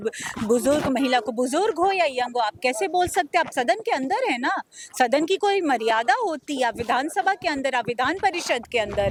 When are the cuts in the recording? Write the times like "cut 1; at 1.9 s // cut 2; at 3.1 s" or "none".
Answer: none